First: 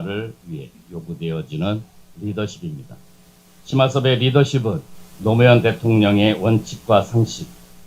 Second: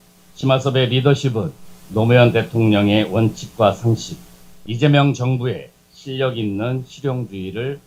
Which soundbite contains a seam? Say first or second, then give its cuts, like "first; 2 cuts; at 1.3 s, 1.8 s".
first; 1 cut; at 2.0 s